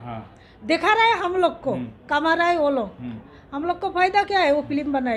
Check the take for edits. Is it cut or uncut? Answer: uncut